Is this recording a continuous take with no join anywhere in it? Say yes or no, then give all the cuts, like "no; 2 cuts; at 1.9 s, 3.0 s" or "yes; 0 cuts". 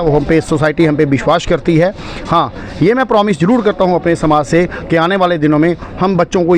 yes; 0 cuts